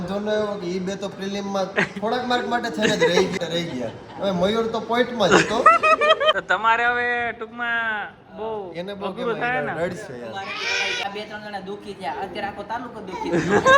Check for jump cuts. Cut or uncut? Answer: cut